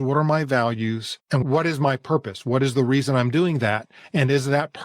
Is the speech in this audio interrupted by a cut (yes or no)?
yes